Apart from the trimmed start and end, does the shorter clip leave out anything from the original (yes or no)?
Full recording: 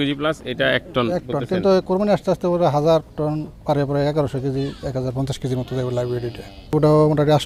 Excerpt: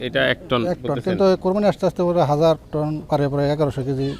yes